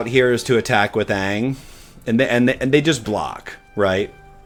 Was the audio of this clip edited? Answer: no; 0 cuts

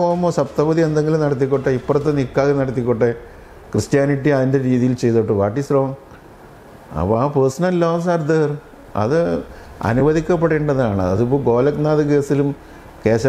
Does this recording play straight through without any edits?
yes; 0 cuts

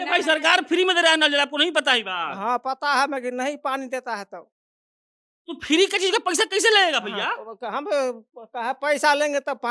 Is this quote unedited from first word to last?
yes; 0 cuts

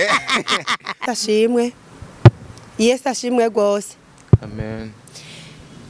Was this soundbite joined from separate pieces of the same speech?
yes; 1 cut; at 1.0 s

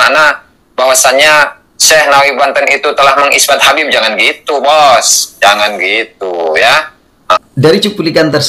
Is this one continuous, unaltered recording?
yes; 0 cuts

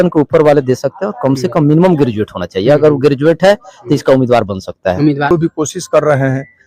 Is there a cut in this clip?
yes; 1 cut; at 5.3 s

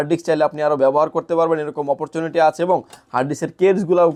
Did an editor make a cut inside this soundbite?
no; 0 cuts

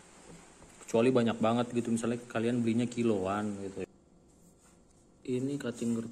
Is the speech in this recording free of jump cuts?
no; 1 cut; at 3.8 s

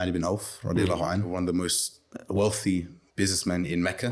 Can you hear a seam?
yes; 1 cut; at 1.3 s

